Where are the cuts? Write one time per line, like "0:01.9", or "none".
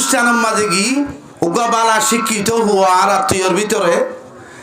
0:01.2